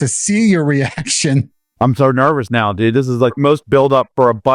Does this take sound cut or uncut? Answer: cut